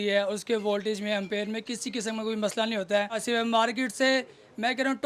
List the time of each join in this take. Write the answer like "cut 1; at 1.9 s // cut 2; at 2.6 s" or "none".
cut 1; at 3.2 s